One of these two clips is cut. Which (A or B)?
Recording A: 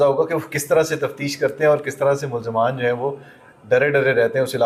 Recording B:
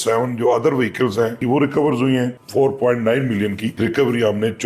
B